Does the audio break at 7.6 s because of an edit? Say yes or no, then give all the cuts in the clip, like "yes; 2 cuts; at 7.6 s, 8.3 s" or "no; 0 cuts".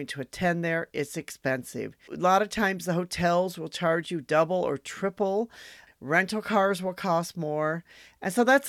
no; 2 cuts; at 2.1 s, 5.8 s